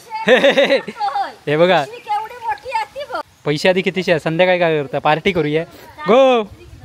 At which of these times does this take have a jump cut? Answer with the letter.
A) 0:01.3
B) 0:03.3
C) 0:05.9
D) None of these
B